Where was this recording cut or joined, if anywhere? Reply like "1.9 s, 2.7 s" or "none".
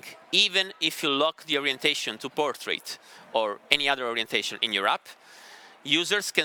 none